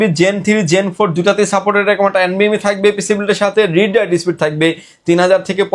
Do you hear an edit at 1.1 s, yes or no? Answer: no